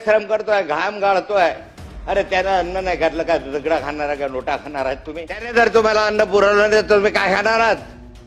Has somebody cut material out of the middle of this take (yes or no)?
yes